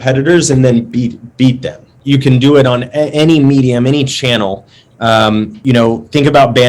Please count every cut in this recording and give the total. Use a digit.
2